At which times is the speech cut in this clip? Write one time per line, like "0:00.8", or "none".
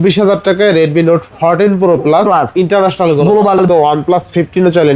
0:03.6